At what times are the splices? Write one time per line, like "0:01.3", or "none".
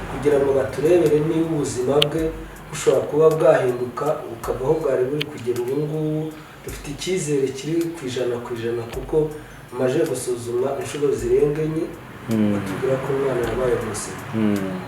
none